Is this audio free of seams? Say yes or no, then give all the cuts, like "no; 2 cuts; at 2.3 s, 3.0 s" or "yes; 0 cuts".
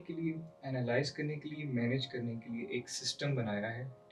yes; 0 cuts